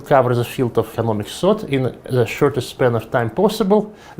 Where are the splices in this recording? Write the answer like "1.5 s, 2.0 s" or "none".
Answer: 0.9 s